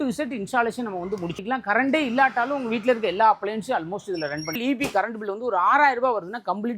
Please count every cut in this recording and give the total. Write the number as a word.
two